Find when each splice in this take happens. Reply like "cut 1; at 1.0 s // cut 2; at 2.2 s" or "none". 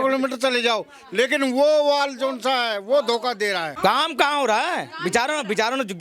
cut 1; at 3.7 s